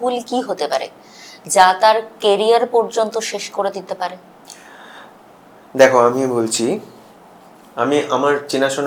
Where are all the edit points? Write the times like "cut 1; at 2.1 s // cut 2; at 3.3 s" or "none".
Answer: none